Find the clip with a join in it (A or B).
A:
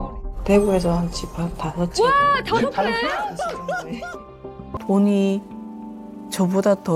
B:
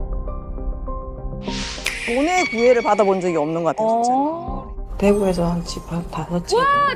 A